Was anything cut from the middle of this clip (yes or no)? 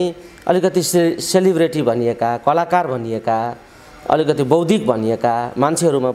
no